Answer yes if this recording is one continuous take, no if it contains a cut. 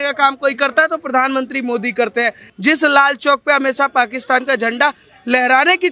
no